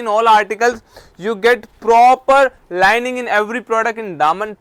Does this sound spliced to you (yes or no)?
no